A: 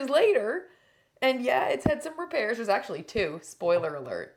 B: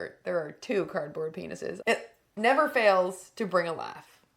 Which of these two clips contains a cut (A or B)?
B